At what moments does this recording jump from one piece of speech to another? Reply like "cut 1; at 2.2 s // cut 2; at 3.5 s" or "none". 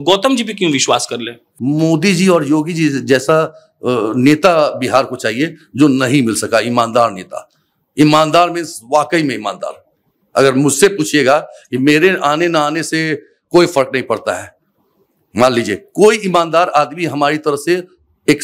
cut 1; at 1.4 s